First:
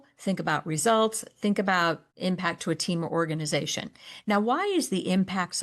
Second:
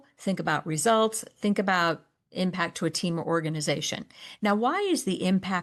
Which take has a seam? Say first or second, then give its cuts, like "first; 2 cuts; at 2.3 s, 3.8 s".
first; 1 cut; at 2.1 s